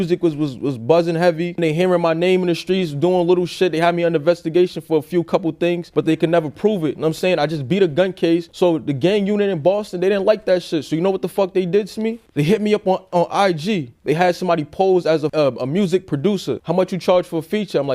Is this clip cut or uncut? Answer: cut